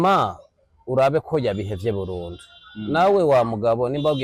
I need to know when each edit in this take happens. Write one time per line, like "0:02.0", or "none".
none